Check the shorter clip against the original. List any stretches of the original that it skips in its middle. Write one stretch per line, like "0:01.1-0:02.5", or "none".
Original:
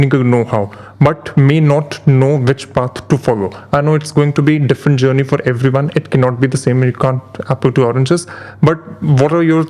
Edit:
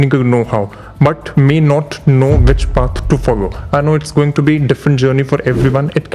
none